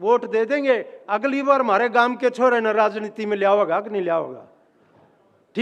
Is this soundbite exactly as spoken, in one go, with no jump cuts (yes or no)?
yes